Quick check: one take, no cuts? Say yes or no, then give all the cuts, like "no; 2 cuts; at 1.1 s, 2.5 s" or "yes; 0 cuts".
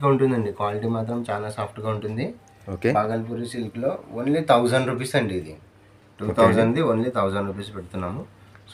yes; 0 cuts